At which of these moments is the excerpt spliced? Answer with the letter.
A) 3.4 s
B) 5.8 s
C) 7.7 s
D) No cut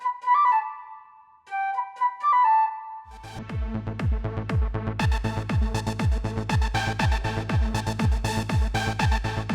D